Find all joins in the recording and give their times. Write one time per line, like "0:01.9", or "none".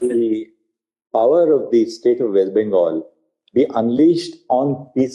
none